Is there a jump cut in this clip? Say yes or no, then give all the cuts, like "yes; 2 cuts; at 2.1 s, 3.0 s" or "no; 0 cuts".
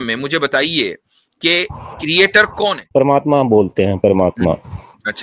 yes; 1 cut; at 2.9 s